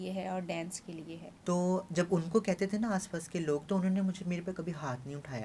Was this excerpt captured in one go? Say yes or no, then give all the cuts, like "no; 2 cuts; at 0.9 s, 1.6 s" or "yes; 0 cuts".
no; 1 cut; at 1.2 s